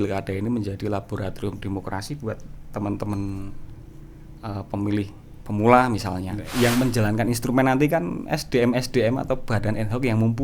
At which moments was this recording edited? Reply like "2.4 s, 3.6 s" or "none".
6.4 s